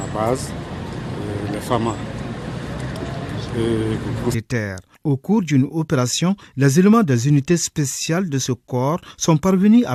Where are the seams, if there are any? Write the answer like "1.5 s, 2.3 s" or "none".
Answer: none

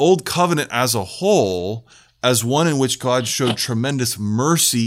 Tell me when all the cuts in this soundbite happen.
none

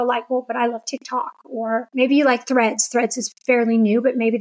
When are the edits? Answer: 1.9 s

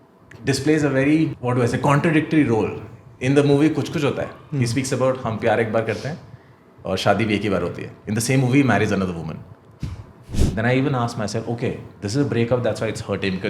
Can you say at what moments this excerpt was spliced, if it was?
1.4 s, 10.3 s

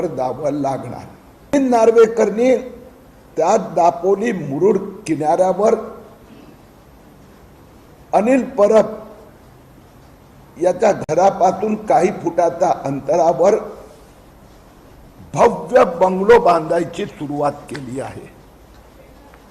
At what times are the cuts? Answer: 1.5 s

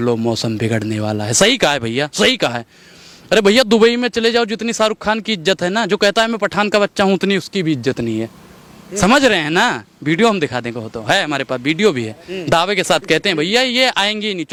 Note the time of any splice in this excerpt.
none

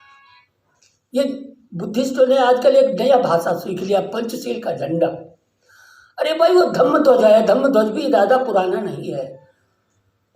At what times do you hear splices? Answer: none

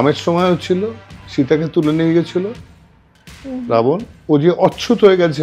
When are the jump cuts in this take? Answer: 4.1 s

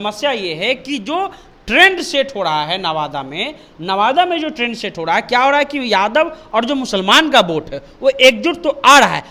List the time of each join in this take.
none

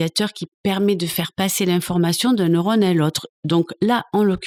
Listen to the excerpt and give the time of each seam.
none

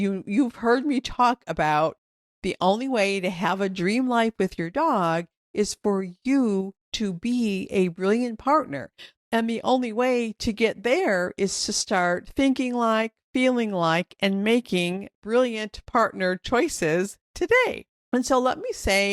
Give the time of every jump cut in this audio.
15.1 s, 17.9 s

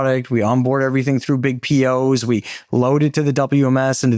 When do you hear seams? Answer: none

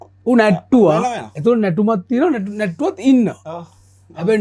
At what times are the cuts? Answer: none

